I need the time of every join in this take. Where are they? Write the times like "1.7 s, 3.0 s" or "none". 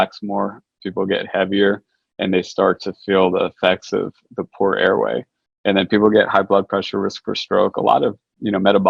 none

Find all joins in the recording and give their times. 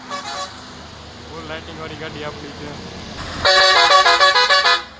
3.2 s

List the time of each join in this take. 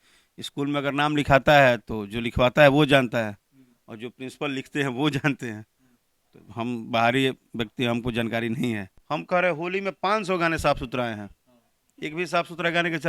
8.9 s

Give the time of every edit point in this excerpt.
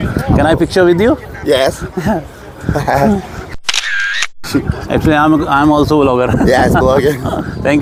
none

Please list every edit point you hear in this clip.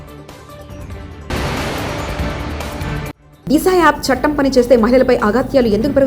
1.3 s, 3.2 s

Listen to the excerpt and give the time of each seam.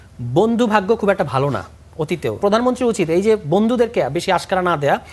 2.4 s

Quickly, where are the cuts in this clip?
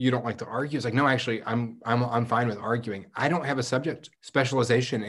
4.1 s

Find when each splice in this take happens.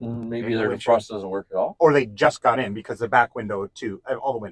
1.7 s

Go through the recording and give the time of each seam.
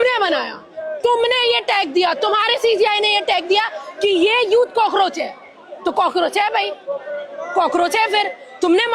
none

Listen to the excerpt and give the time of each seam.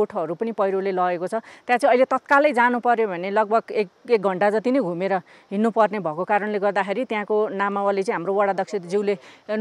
none

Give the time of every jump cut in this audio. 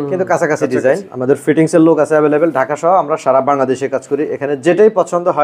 1.1 s

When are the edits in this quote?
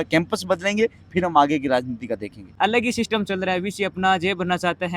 2.4 s

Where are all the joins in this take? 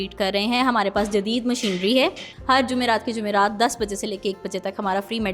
2.3 s

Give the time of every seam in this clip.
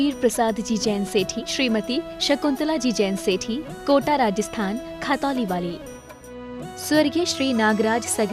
1.4 s

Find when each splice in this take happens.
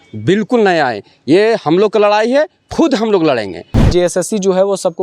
3.8 s

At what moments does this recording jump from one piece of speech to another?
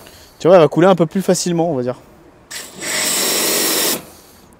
none

